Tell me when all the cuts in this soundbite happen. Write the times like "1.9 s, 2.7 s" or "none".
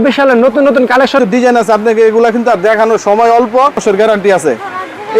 1.2 s, 3.8 s